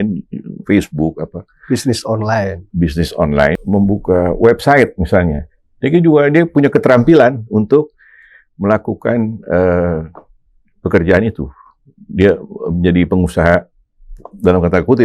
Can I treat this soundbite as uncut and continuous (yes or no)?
no